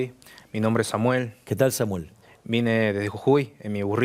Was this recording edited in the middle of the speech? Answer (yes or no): no